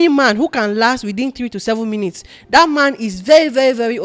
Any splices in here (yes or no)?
no